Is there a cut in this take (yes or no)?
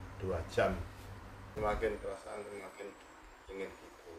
yes